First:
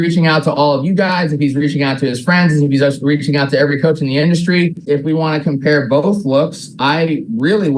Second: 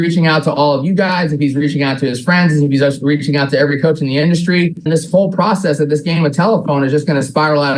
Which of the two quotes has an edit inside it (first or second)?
first